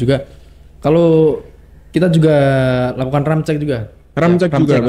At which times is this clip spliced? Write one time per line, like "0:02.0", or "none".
none

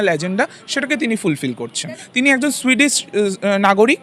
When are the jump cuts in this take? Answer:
0:02.0

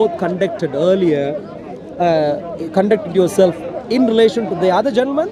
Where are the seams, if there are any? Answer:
none

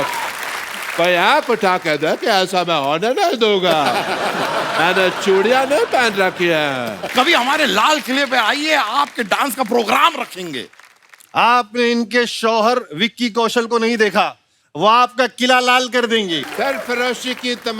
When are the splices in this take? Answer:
0:07.0
0:16.4

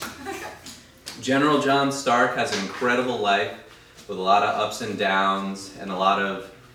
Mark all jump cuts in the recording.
none

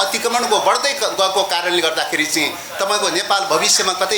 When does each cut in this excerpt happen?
none

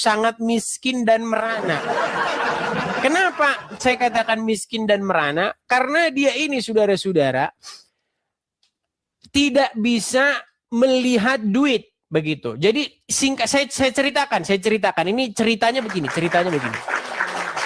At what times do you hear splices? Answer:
none

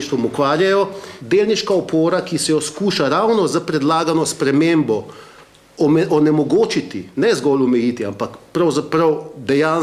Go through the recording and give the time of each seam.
0:01.1

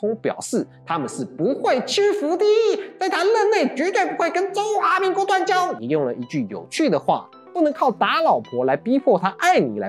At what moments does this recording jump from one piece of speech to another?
none

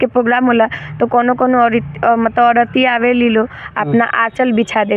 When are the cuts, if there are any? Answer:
none

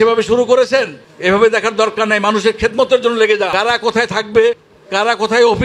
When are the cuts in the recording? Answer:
0:03.5

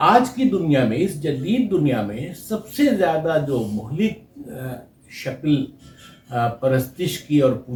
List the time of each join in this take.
none

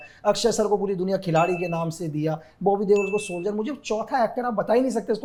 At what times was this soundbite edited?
none

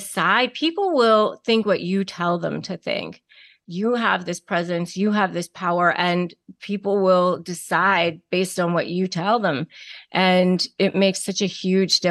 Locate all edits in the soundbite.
none

